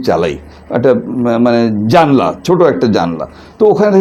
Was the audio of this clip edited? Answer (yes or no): no